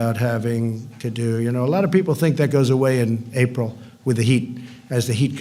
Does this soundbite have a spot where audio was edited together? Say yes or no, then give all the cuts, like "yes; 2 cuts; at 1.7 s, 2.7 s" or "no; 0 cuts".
no; 0 cuts